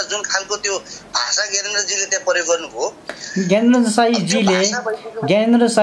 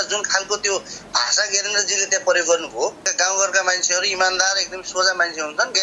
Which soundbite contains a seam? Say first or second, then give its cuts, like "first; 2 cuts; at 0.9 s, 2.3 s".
second; 1 cut; at 3.1 s